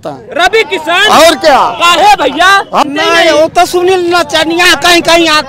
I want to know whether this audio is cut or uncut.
cut